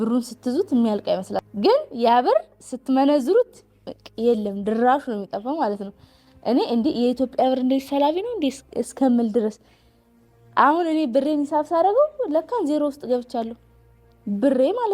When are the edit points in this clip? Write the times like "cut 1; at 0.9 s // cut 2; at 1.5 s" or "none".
cut 1; at 1.4 s